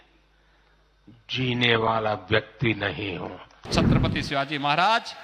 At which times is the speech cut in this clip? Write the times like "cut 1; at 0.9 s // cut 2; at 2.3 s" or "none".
cut 1; at 3.7 s